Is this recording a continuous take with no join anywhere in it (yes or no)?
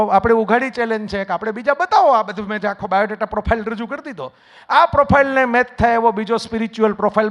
yes